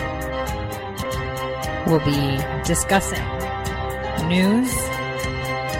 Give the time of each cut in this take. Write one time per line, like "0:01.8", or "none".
0:01.0

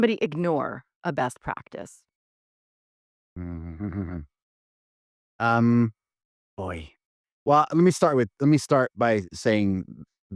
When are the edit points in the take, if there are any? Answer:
none

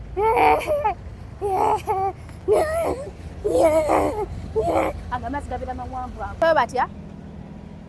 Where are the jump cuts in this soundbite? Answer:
0:06.4

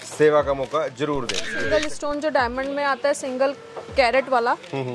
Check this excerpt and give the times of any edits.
0:01.5

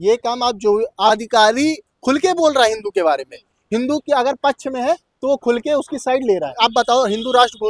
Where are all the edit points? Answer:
0:01.1
0:06.5

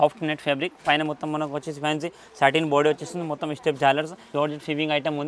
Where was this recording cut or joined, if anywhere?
0:04.2

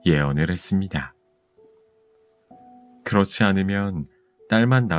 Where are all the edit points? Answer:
0:01.2
0:02.8

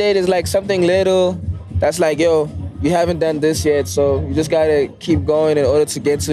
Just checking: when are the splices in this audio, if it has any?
0:01.7
0:02.6

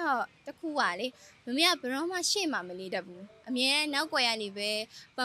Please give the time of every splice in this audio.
none

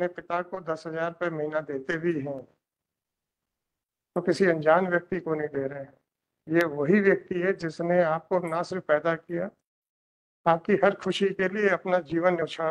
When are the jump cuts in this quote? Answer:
none

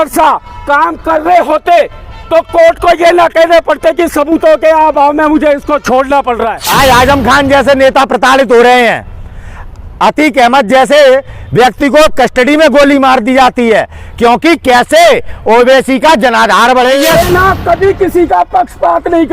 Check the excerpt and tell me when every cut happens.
0:06.6
0:17.0

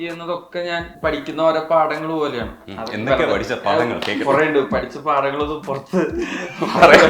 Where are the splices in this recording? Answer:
0:00.9

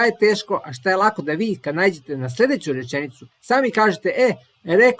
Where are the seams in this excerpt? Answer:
none

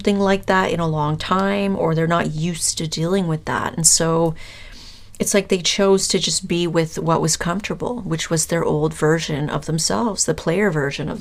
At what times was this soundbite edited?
none

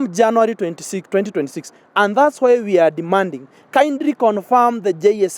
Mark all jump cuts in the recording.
none

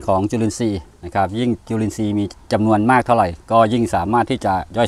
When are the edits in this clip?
0:02.4

